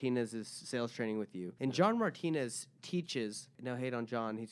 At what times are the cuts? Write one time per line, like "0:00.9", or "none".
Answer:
0:01.5
0:03.5

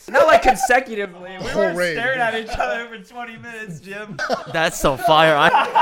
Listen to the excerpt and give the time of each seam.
0:04.2

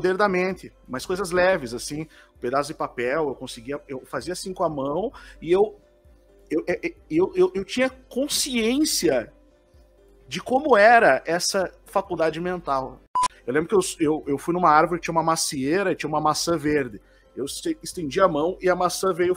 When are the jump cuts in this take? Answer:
0:13.1

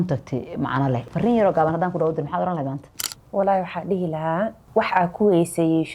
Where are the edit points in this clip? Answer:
0:01.0
0:04.6

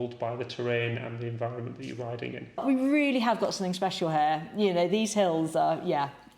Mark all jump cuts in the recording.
0:02.6

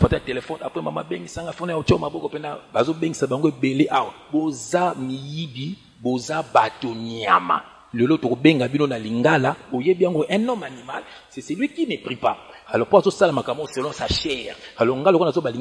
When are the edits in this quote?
0:04.2
0:09.6

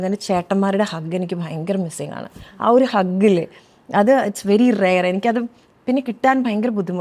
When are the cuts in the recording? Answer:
none

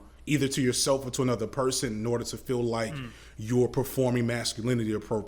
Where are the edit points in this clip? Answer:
none

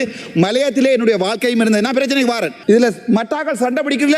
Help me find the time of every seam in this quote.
0:02.5

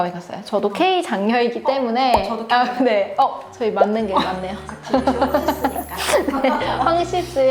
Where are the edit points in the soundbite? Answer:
none

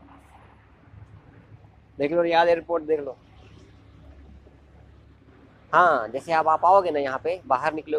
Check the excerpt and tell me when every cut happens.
none

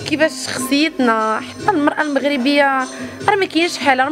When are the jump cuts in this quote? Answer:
none

